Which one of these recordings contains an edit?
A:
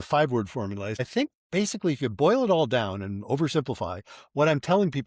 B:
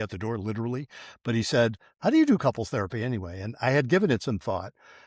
A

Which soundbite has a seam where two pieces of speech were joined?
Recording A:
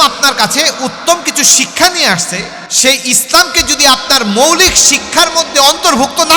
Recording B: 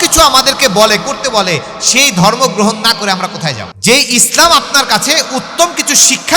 B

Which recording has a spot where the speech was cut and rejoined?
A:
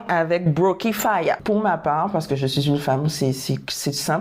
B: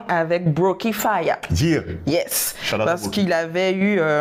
A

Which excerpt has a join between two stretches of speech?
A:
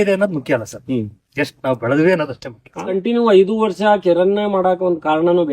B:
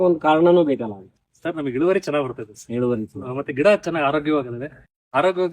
A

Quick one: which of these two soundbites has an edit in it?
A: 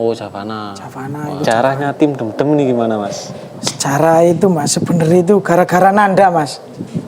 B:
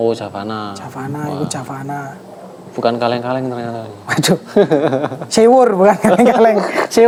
A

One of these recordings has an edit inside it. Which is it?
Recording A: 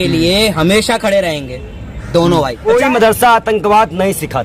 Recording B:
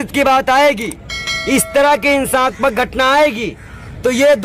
A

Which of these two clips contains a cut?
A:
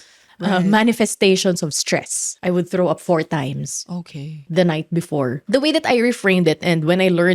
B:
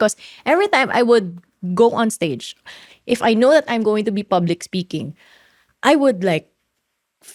A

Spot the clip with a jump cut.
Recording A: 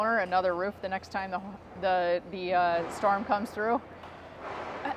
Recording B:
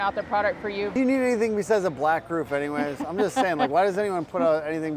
B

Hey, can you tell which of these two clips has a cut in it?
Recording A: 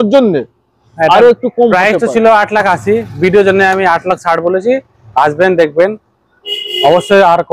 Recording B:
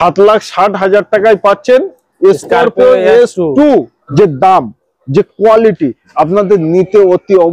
B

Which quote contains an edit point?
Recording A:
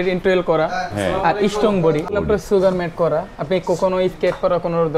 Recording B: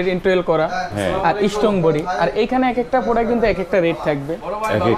A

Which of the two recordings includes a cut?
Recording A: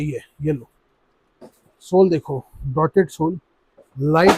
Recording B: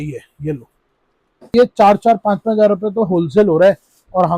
B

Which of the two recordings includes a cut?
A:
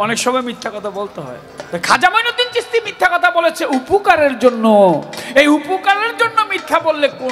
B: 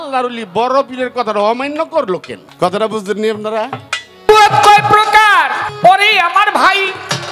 B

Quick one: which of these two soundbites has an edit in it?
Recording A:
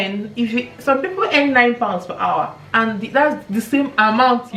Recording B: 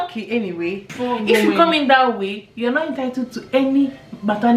B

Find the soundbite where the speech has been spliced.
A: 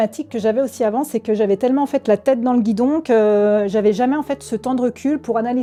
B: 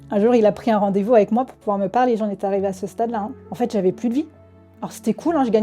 B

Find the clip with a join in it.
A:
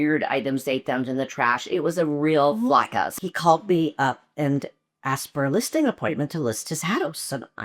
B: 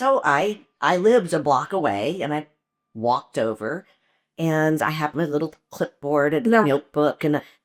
A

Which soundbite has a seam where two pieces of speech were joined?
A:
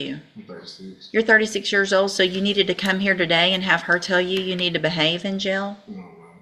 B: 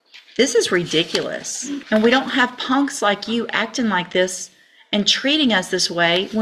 B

